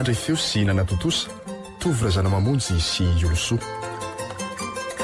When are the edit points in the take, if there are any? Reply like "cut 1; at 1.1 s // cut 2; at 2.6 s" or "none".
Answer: cut 1; at 3.6 s